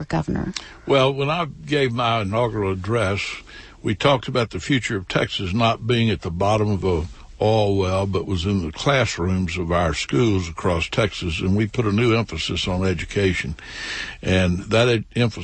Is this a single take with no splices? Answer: yes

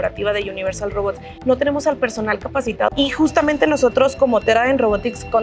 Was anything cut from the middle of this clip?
yes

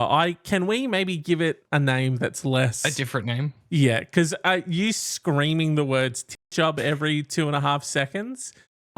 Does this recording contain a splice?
yes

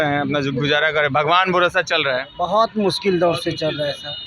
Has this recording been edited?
yes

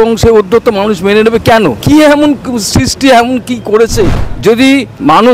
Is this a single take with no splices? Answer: no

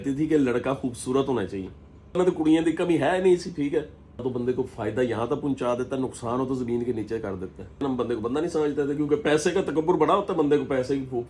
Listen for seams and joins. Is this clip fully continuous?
no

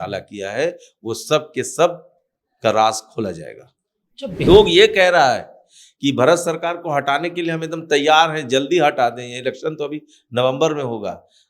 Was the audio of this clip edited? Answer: yes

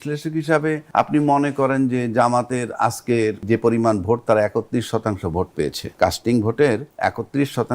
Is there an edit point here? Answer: yes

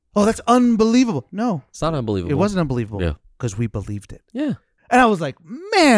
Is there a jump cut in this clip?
yes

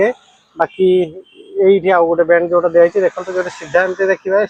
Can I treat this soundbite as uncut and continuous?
yes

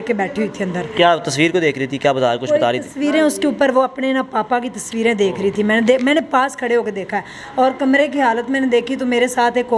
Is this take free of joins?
yes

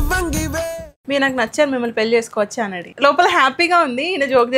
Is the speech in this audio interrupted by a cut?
yes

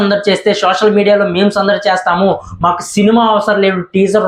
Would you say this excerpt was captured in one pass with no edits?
yes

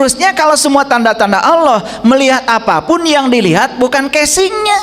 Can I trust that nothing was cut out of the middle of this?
yes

